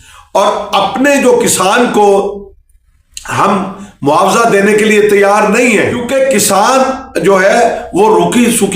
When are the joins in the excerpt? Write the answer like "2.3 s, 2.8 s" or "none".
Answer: 6.0 s